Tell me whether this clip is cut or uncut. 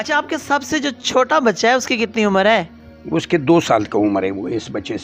uncut